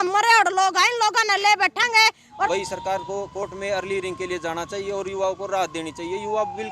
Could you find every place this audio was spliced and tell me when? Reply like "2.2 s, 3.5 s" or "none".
2.5 s

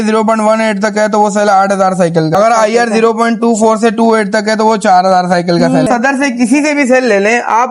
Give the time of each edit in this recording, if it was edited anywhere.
2.3 s, 5.8 s

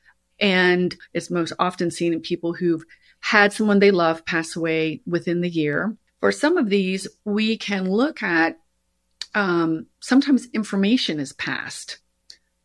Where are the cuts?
1.0 s, 6.0 s

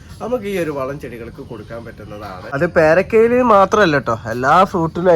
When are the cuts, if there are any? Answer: 2.5 s

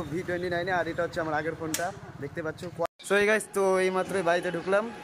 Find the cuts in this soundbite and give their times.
2.9 s

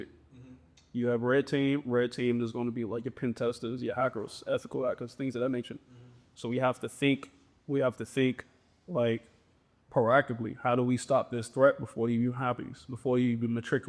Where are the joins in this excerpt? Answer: none

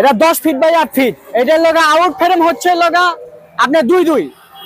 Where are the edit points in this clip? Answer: 1.2 s

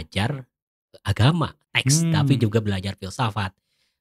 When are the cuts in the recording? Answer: none

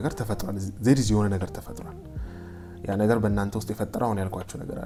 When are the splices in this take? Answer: none

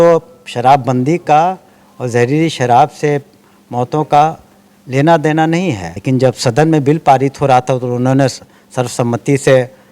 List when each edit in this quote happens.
5.9 s

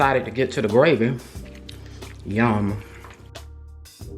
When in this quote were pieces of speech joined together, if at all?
3.3 s

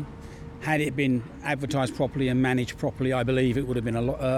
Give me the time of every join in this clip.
none

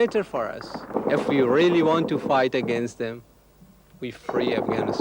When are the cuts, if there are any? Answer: 0.9 s

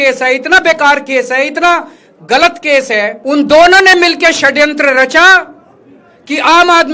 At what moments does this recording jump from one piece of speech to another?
3.2 s

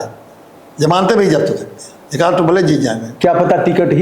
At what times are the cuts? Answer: none

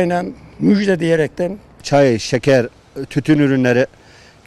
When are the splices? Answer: 1.7 s

